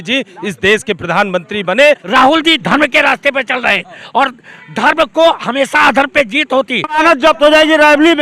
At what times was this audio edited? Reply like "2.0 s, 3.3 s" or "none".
2.0 s, 7.0 s